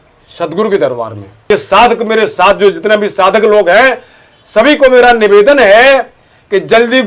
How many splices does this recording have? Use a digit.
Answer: 1